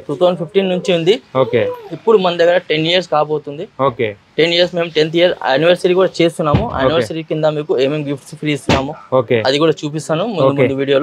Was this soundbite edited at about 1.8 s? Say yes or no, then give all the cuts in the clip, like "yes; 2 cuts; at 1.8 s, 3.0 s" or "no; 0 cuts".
no; 0 cuts